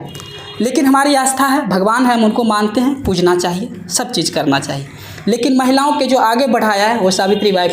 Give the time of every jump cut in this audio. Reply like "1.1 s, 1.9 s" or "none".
none